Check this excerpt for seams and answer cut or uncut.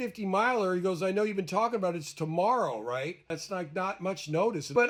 uncut